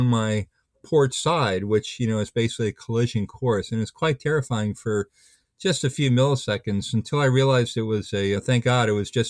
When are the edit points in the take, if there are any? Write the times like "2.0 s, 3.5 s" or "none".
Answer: none